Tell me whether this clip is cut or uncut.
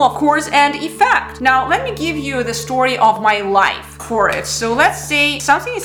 uncut